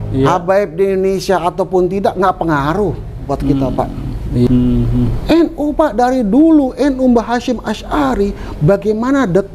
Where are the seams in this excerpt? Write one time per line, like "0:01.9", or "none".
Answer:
0:04.5